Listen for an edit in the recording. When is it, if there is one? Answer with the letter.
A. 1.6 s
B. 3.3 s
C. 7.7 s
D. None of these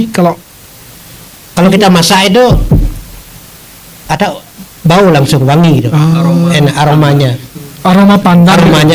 D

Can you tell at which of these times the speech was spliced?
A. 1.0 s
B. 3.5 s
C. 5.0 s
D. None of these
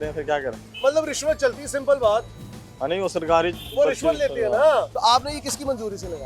C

